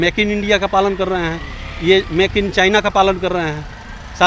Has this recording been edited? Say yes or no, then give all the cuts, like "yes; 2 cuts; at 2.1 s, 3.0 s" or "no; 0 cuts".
no; 0 cuts